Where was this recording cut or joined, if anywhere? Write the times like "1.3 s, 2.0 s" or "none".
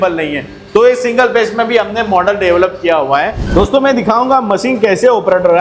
3.4 s